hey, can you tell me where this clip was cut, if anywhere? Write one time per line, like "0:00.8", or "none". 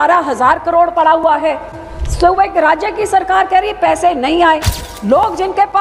none